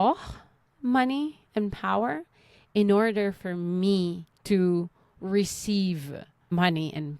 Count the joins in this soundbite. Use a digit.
2